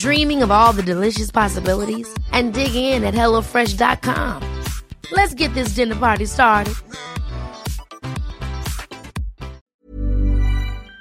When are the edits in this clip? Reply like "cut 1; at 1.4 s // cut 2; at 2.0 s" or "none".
cut 1; at 9.7 s